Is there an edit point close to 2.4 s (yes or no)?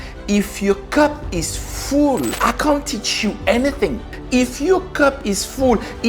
yes